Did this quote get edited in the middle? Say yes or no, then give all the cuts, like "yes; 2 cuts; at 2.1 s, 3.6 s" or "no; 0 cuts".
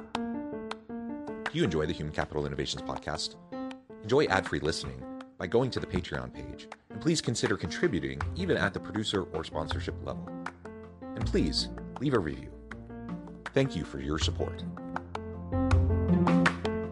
no; 0 cuts